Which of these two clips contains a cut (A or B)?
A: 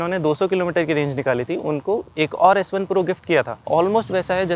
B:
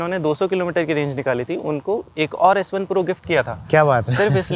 A